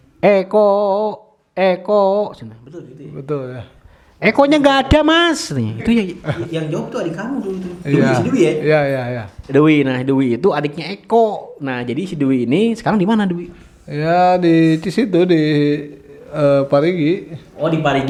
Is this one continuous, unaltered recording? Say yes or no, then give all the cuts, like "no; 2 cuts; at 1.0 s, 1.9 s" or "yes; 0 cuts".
yes; 0 cuts